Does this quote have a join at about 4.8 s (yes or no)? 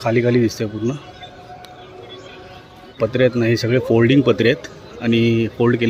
no